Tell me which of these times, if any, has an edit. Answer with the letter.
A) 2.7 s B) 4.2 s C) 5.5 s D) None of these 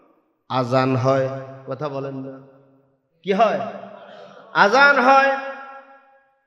D